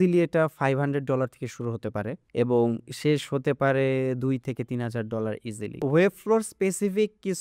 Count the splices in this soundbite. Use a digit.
2